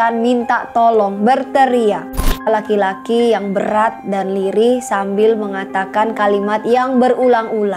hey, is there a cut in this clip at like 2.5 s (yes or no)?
yes